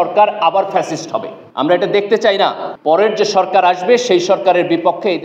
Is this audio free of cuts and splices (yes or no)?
no